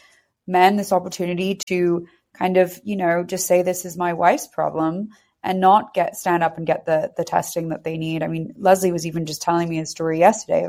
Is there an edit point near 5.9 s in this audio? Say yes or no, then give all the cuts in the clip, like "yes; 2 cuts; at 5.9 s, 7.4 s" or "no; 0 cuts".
no; 0 cuts